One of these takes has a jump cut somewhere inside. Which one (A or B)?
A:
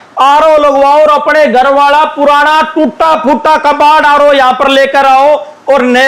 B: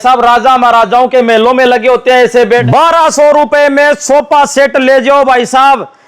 B